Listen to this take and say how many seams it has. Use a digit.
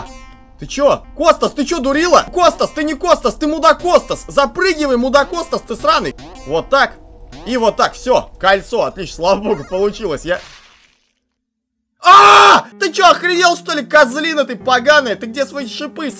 4